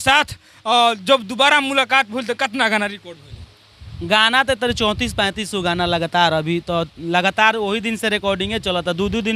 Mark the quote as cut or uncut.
uncut